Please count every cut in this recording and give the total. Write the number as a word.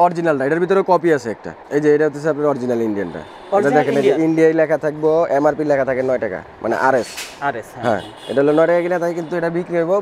zero